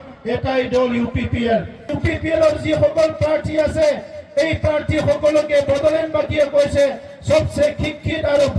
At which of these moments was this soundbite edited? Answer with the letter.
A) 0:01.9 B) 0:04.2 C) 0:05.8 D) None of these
A